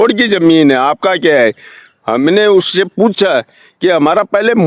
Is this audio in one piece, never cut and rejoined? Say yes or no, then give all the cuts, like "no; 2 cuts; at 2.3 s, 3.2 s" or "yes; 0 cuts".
yes; 0 cuts